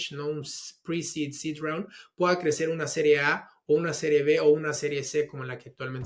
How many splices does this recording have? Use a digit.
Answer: 0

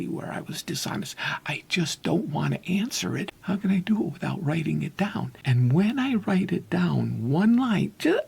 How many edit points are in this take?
2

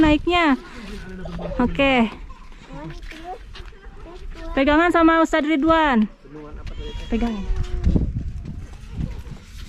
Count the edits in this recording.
0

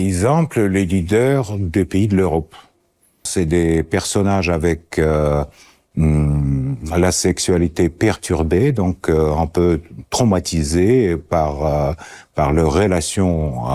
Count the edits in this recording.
1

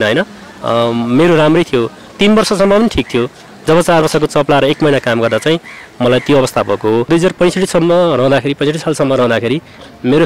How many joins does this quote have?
1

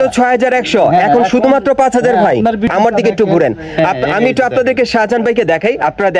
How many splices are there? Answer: 1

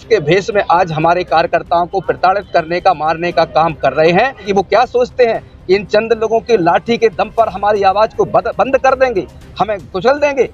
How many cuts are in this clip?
1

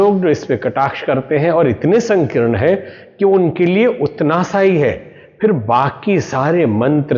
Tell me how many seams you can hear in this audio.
0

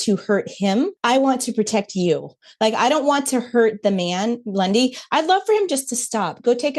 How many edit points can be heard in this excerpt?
1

